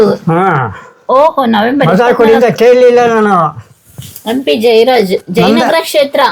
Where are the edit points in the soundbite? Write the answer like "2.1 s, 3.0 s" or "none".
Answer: none